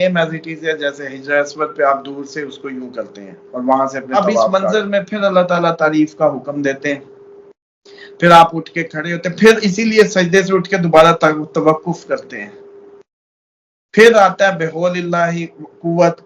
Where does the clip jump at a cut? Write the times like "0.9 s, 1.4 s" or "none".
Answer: 4.5 s